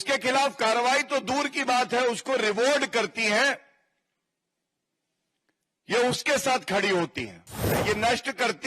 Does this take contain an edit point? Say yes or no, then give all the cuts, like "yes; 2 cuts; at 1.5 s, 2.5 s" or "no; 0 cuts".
yes; 1 cut; at 7.6 s